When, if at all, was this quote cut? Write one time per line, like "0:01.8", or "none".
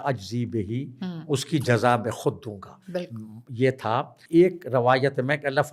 none